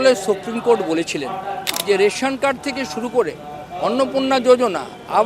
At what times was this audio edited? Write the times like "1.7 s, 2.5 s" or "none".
1.7 s